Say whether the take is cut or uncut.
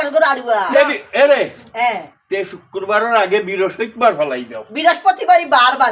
uncut